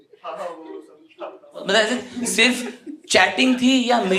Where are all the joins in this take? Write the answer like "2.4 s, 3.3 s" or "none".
1.6 s